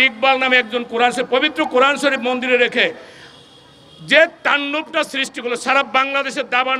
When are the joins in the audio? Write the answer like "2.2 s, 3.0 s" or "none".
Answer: none